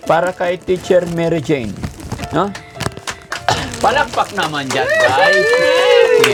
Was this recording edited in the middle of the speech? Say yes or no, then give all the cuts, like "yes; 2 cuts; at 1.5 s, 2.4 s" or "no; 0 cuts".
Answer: no; 0 cuts